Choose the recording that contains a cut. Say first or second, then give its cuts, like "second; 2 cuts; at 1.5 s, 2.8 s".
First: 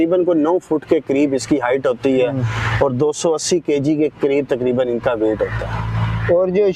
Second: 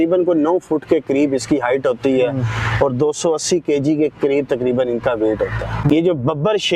second; 1 cut; at 5.8 s